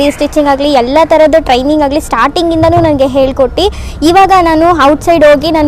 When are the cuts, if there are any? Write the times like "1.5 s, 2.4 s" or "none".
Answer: none